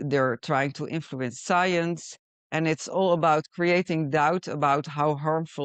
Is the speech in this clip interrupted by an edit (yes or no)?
no